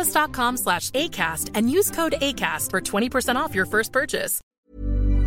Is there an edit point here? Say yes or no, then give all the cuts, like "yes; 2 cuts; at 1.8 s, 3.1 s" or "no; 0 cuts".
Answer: yes; 1 cut; at 4.4 s